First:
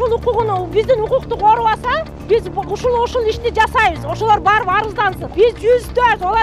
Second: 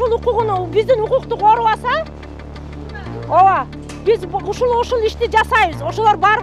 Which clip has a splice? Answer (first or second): first